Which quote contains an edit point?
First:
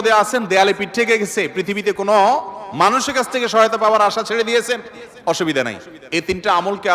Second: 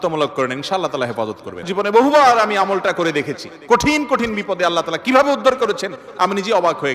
second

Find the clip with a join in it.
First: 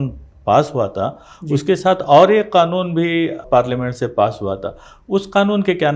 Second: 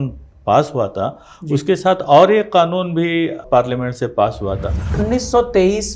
second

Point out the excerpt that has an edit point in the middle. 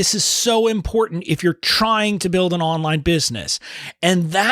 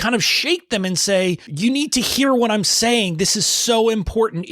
second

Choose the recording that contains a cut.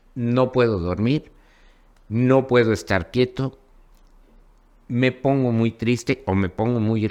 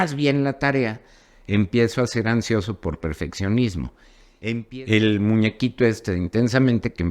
second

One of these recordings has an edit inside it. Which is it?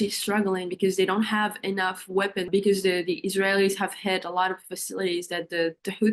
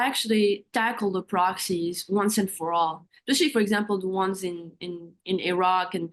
first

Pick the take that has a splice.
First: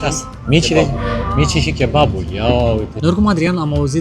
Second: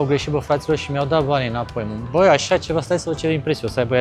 first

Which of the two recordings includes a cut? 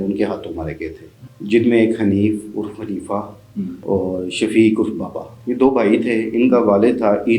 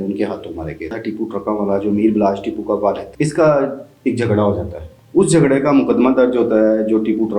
second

